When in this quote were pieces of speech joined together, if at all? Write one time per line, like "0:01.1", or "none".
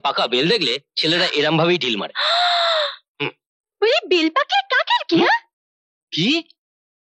none